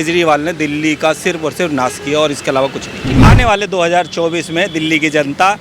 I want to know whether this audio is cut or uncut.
cut